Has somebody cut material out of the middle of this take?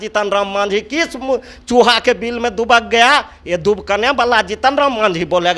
no; 0 cuts

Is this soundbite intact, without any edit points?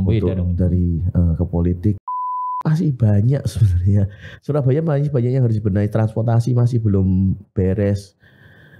no; 1 cut; at 2.0 s

